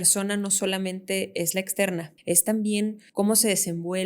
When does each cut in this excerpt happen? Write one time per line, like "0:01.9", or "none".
0:02.1
0:03.0